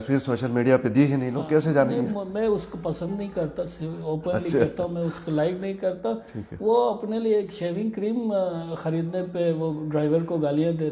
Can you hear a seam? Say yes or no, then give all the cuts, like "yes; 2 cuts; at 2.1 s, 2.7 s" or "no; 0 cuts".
no; 0 cuts